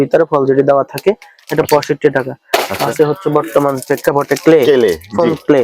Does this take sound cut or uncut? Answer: uncut